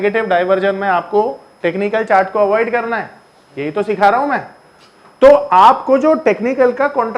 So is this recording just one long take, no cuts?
yes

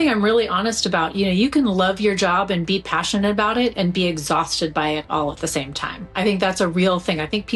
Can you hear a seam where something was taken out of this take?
no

